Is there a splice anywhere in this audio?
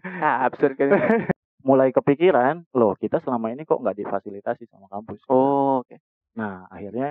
yes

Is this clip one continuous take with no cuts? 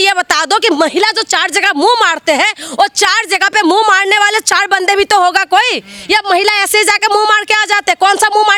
yes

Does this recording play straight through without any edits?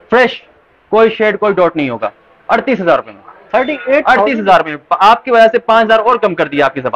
yes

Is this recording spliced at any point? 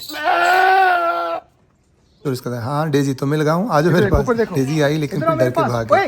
yes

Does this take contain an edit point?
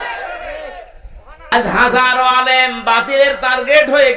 yes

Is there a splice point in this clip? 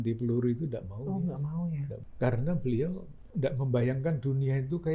yes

